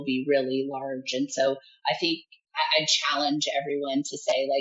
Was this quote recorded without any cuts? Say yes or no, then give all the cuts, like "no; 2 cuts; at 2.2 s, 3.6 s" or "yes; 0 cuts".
yes; 0 cuts